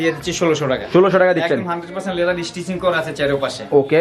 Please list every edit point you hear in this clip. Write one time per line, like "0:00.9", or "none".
none